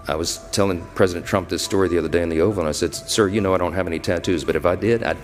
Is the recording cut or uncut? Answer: uncut